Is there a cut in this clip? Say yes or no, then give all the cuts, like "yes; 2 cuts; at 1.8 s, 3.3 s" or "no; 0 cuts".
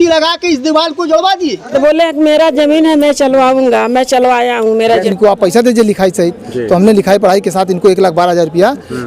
yes; 2 cuts; at 1.7 s, 5.0 s